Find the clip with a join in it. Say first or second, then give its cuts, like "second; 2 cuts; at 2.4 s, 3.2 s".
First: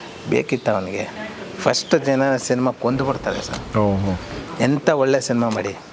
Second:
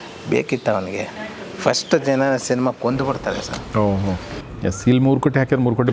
second; 1 cut; at 4.4 s